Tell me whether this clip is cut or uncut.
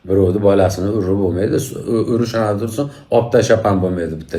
uncut